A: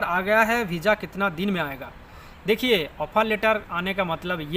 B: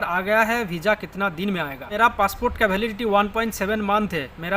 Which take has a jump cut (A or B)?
B